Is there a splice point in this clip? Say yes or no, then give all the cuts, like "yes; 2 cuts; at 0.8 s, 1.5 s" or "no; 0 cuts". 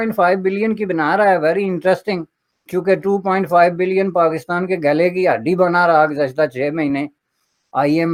no; 0 cuts